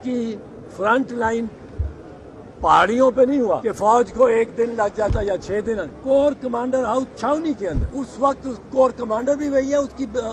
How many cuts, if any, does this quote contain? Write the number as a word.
three